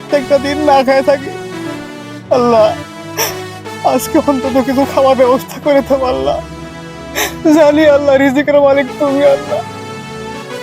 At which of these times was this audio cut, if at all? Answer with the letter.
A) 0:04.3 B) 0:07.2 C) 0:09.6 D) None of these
C